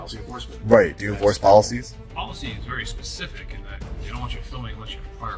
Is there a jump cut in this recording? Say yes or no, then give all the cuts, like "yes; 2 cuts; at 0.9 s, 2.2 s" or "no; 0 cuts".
yes; 1 cut; at 2.2 s